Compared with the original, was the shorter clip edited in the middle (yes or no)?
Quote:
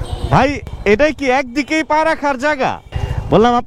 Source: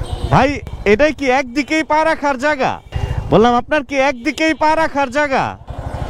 no